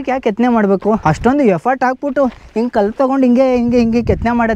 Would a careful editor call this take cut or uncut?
cut